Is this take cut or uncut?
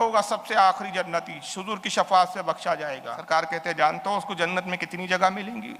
cut